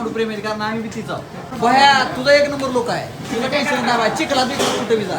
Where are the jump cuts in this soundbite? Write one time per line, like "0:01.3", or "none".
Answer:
0:01.5